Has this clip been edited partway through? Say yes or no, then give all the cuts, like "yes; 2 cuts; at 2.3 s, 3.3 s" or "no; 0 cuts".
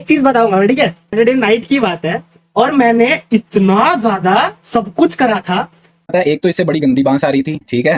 yes; 2 cuts; at 1.1 s, 6.1 s